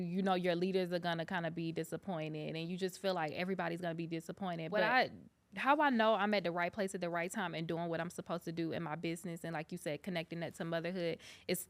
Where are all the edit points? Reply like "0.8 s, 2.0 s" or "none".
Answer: 4.9 s